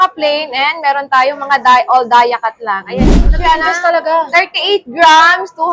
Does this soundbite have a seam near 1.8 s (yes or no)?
no